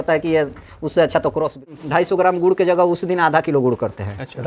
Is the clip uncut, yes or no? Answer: no